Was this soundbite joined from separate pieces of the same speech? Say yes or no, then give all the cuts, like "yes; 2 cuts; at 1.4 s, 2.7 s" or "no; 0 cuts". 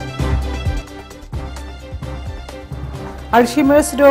no; 0 cuts